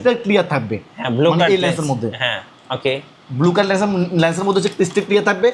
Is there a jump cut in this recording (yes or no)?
no